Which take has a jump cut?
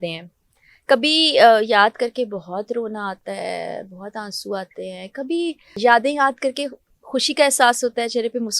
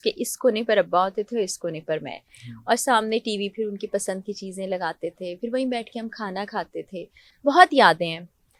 first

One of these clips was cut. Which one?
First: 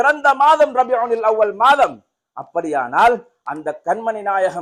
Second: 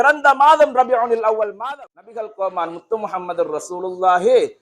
second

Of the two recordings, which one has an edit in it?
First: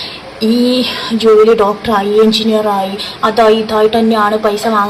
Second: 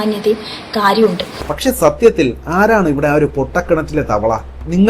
second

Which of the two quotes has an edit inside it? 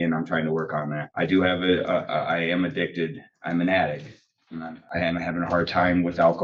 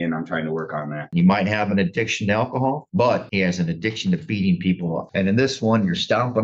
second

